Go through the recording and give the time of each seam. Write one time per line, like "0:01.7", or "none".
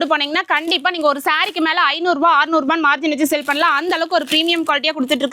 none